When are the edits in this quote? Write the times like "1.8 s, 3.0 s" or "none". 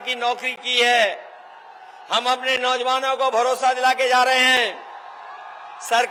none